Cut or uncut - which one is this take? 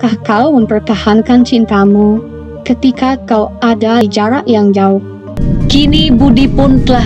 cut